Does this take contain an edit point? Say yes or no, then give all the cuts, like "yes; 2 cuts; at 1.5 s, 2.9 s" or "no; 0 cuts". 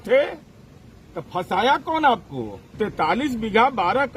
yes; 1 cut; at 2.7 s